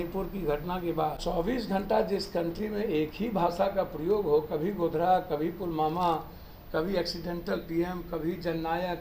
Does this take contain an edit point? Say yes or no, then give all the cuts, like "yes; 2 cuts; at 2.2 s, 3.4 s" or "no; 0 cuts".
yes; 1 cut; at 1.2 s